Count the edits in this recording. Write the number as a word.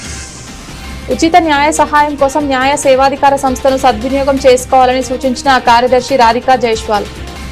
zero